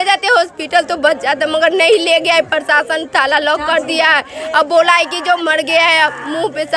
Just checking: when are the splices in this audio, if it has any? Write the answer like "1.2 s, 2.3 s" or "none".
none